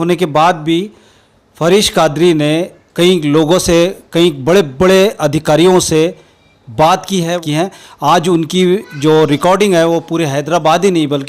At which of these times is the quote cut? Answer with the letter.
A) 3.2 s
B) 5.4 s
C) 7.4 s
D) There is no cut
C